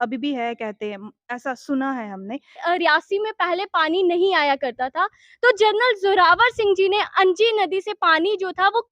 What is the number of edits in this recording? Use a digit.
1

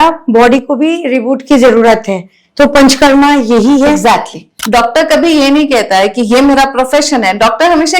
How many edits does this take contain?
1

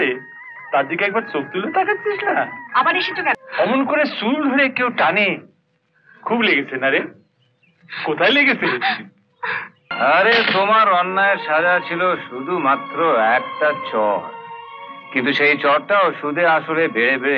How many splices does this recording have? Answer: 2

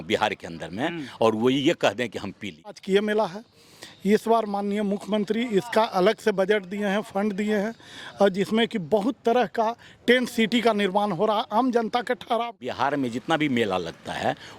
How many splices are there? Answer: 2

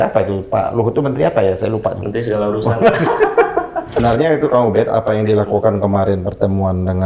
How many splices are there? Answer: 1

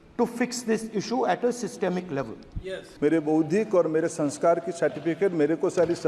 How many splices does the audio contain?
1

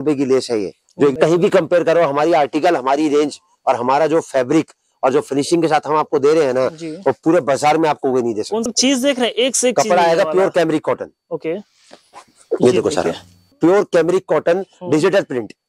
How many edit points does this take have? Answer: 3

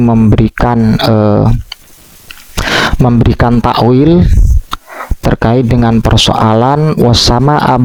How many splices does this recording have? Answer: 0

